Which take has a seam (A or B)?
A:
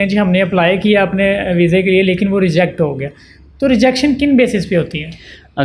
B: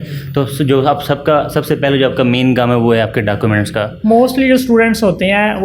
B